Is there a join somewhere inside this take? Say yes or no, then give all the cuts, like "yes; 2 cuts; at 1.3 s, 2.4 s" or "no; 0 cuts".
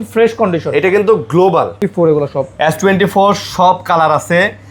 yes; 1 cut; at 1.8 s